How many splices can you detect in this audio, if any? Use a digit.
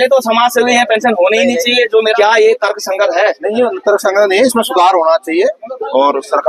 1